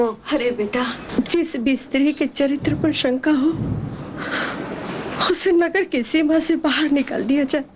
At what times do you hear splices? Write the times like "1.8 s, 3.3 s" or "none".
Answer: 1.0 s